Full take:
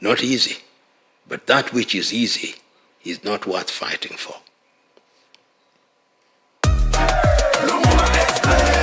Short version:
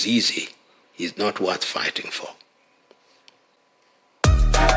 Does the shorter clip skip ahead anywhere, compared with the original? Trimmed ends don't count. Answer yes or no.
yes